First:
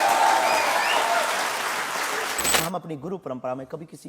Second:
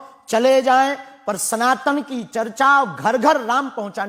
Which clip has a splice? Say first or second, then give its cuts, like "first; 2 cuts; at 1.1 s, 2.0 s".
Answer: first; 1 cut; at 2.6 s